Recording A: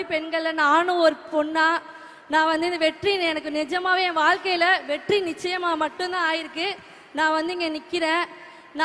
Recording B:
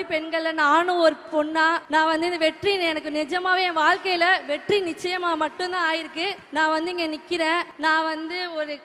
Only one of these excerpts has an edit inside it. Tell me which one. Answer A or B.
B